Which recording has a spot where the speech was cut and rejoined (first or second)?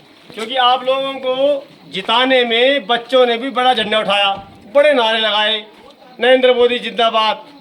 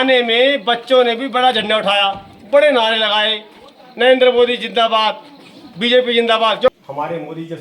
second